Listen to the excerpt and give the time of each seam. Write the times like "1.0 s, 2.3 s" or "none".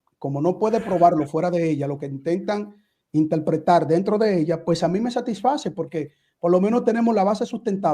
2.8 s

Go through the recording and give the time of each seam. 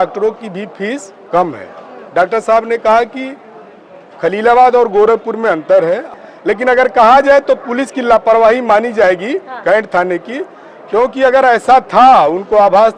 6.1 s

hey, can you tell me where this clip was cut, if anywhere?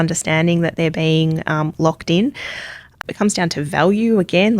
3.0 s

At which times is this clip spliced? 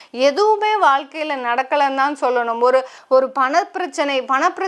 3.0 s

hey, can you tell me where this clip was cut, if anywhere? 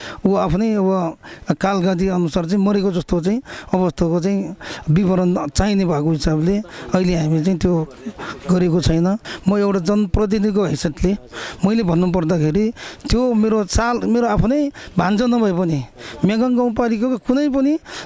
9.3 s

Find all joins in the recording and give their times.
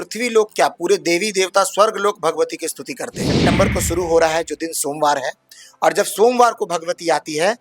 3.3 s

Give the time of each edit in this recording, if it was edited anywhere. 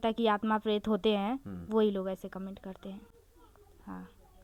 none

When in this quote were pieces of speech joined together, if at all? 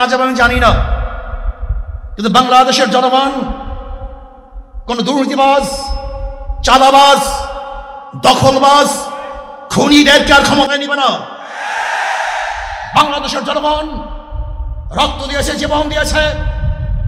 none

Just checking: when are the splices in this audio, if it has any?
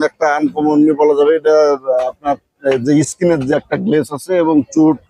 none

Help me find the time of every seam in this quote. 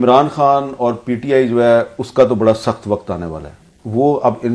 none

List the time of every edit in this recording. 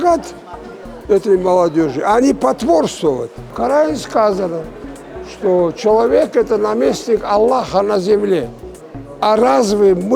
3.5 s

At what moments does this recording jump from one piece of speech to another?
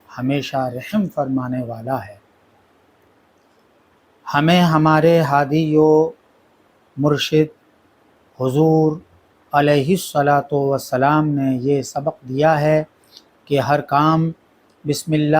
3.1 s

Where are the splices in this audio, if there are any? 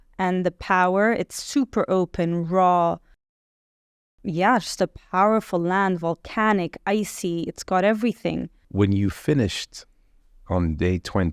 8.5 s

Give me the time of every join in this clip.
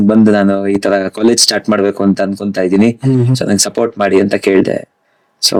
none

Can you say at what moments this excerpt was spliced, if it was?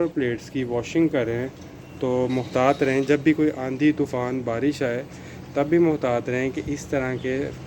none

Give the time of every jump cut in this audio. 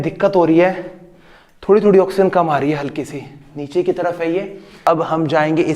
4.8 s

